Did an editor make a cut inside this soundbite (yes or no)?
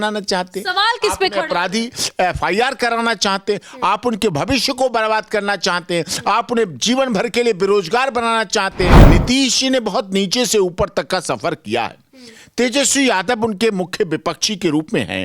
yes